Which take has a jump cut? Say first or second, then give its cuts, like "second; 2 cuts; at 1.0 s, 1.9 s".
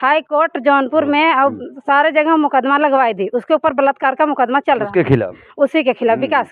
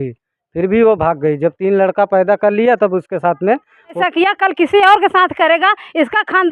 second; 1 cut; at 4.0 s